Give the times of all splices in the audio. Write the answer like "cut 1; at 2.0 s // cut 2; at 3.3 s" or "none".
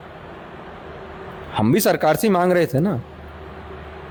none